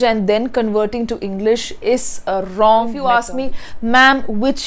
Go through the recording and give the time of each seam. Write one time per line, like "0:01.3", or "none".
0:03.0